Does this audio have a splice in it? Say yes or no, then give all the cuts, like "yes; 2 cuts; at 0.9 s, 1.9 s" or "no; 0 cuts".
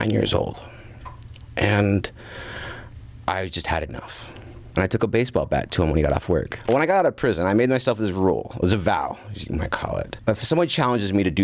yes; 3 cuts; at 4.6 s, 6.7 s, 10.2 s